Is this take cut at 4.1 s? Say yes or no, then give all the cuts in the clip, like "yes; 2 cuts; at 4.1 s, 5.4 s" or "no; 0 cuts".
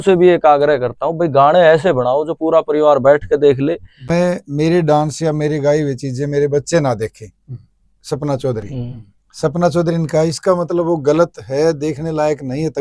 yes; 1 cut; at 4.1 s